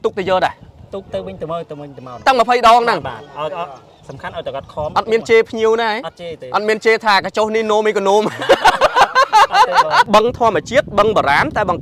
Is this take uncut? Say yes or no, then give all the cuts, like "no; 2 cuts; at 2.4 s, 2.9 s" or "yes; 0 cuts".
no; 1 cut; at 10.1 s